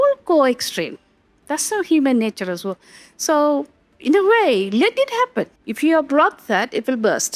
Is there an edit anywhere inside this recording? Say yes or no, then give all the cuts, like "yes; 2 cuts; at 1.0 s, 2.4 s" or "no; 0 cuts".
yes; 1 cut; at 5.6 s